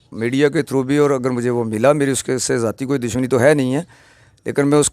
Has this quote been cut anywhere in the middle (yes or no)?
no